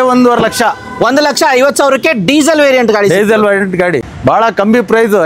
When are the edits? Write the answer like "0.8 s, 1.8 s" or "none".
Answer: 4.0 s